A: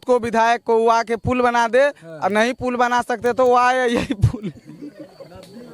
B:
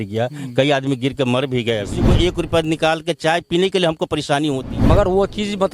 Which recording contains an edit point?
B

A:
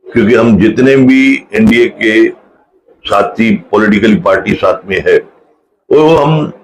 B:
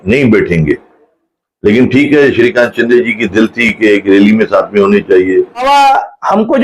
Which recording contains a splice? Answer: B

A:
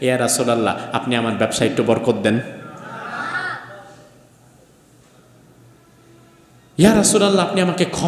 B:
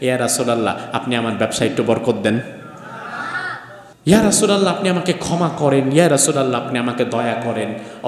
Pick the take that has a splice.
B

